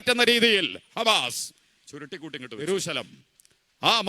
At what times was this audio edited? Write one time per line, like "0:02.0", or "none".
0:02.6